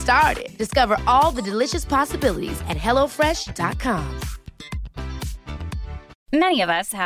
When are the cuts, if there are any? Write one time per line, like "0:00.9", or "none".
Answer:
0:06.1